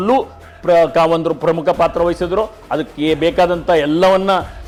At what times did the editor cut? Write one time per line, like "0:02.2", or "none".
none